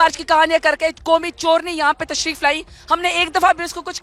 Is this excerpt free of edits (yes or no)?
yes